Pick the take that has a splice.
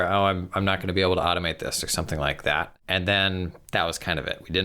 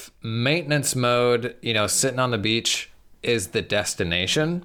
first; 1 cut; at 2.8 s

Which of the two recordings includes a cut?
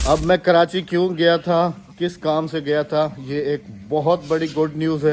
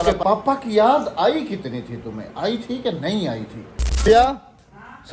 second; 1 cut; at 4.1 s

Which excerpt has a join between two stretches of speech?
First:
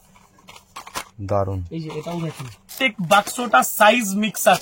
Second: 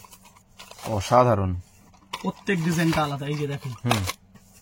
first; 1 cut; at 2.7 s

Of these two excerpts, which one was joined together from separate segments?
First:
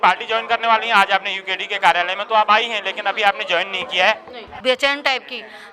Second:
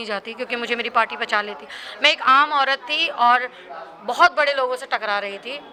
first; 1 cut; at 4.5 s

